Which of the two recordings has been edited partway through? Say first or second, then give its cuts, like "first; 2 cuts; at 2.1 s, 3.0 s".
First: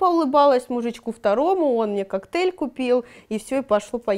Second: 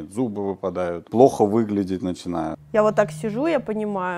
second; 2 cuts; at 1.0 s, 2.6 s